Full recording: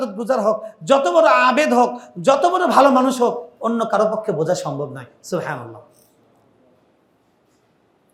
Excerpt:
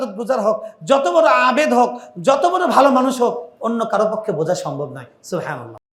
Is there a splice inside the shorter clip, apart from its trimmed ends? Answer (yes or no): no